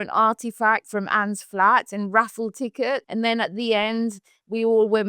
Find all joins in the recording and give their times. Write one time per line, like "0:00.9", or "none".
0:00.9
0:03.1